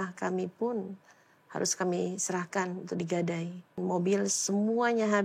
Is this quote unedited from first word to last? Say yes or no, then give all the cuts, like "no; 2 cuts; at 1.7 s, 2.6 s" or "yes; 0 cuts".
no; 1 cut; at 3.8 s